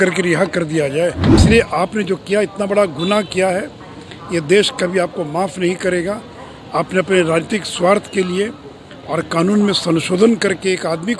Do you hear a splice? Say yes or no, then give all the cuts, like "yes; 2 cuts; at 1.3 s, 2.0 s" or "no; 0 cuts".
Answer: yes; 1 cut; at 1.4 s